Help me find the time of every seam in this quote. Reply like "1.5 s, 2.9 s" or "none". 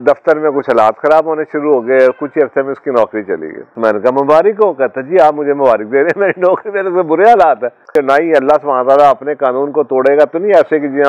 3.7 s, 7.9 s